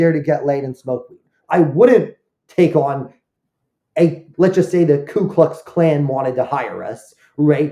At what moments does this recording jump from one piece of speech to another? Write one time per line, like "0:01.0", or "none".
0:01.4
0:04.3